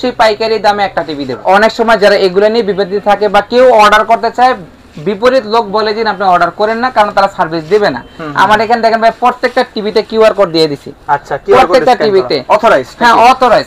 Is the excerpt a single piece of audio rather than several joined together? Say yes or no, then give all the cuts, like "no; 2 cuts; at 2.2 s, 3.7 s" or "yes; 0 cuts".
no; 1 cut; at 1.4 s